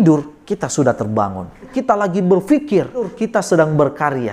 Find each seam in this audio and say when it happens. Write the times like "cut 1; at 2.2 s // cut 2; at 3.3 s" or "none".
cut 1; at 1.7 s // cut 2; at 3.1 s